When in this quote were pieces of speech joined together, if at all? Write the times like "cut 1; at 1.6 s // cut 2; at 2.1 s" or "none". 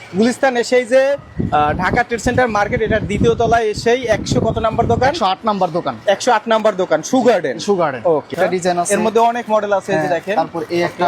cut 1; at 8.3 s